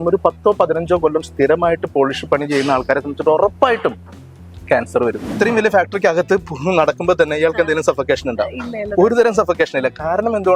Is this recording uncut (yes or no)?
no